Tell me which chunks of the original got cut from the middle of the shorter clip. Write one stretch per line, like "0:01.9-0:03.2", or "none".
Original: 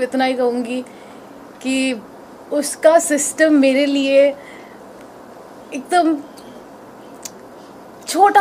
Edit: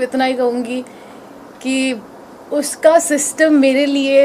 none